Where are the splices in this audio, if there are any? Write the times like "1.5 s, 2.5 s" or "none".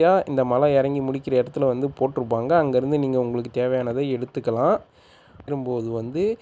5.5 s